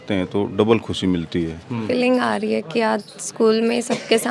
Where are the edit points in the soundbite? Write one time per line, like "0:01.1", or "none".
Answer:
0:01.9

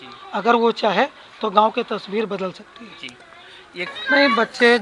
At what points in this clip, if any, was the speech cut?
0:03.9

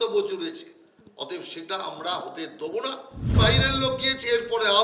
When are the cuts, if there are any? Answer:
0:03.3

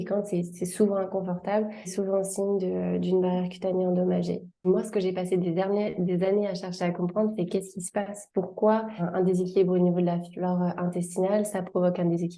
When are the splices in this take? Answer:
0:01.9
0:04.7
0:09.0

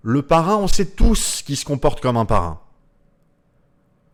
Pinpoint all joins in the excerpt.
none

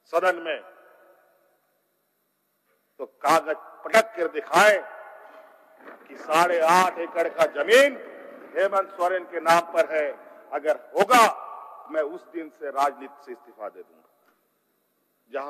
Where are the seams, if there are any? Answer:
0:14.2

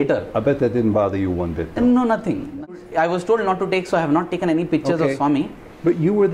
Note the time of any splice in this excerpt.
0:02.7

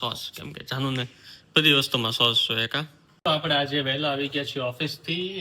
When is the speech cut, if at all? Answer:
0:03.2

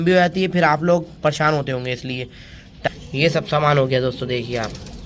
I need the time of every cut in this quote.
0:02.9

